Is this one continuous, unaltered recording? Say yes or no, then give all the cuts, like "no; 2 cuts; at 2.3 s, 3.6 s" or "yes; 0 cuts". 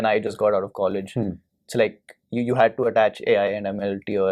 yes; 0 cuts